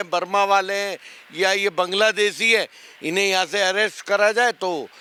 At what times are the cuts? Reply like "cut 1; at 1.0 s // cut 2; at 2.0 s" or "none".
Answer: none